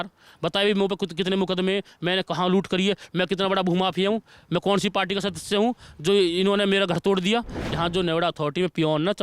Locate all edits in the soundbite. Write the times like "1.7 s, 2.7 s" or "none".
7.6 s